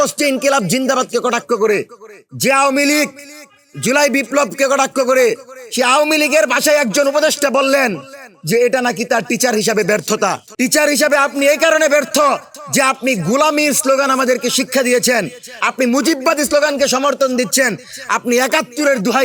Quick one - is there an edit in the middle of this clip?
no; 0 cuts

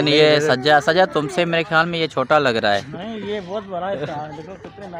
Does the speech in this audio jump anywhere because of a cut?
no; 0 cuts

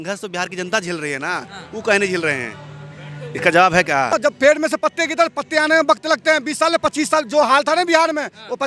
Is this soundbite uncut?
no; 1 cut; at 4.1 s

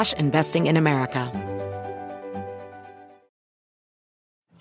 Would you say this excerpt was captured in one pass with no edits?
no; 1 cut; at 1.3 s

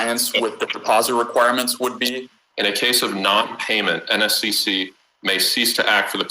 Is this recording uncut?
no; 1 cut; at 2.3 s

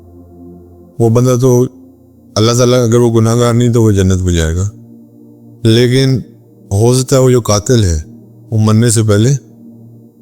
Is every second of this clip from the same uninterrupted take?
no; 1 cut; at 0.9 s

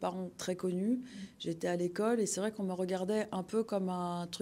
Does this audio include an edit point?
no; 0 cuts

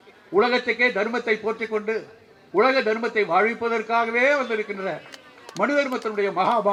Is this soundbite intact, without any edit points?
yes; 0 cuts

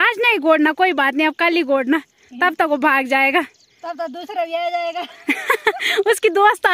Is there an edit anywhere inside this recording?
no; 0 cuts

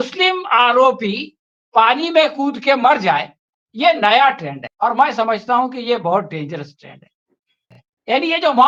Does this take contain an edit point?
no; 0 cuts

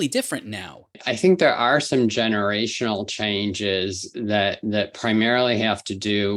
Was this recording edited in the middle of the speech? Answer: yes; 1 cut; at 0.9 s

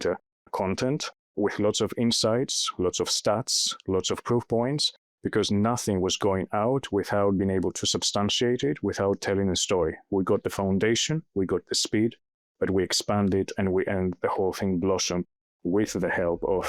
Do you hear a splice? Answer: no; 0 cuts

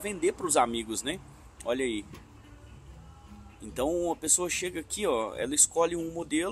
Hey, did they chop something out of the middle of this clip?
no; 0 cuts

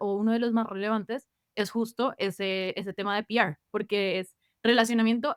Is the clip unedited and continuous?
yes; 0 cuts

